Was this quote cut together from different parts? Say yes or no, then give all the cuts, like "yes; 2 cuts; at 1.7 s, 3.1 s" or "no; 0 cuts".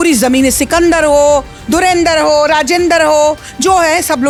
no; 0 cuts